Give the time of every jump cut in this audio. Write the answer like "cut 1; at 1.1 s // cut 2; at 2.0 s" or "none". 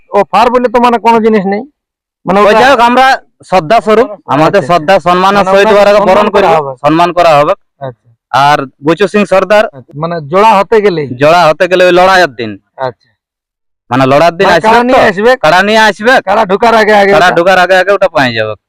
cut 1; at 9.8 s